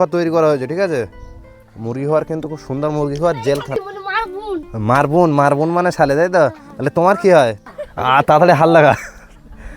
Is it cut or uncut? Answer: cut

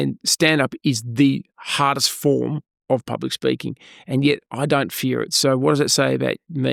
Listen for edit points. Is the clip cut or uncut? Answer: uncut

